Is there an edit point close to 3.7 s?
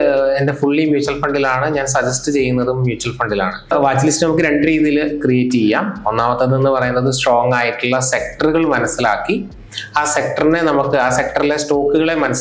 yes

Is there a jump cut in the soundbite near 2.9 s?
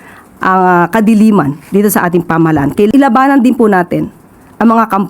yes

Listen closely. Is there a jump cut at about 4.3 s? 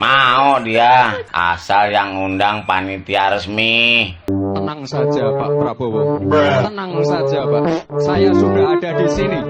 yes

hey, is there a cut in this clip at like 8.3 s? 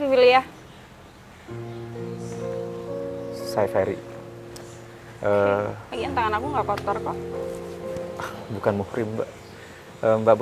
yes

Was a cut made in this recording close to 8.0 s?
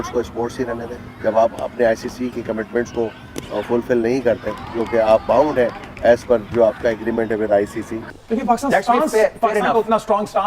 yes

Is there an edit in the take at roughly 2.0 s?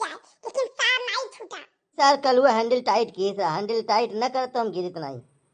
yes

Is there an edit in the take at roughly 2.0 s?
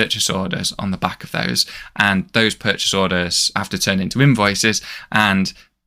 no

